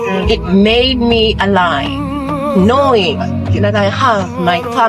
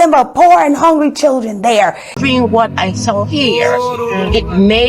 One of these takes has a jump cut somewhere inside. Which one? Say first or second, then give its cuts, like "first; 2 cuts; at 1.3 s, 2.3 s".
second; 1 cut; at 2.1 s